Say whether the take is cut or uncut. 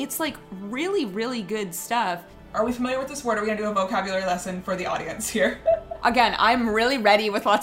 cut